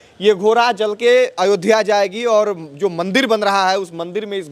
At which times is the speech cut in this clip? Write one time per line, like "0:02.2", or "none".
none